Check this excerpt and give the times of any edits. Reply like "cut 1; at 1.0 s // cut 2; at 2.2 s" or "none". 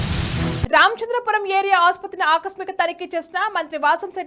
none